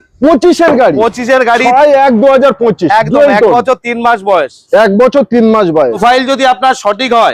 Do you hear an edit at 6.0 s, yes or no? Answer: yes